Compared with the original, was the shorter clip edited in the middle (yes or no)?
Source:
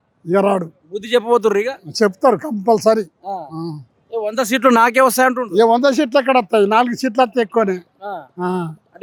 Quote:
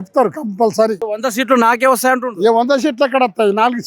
yes